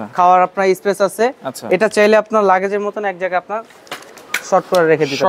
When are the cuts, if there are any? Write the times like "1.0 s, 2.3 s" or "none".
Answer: none